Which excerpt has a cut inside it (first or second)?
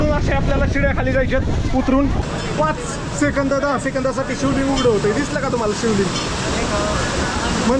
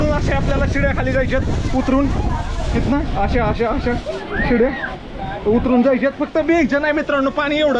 first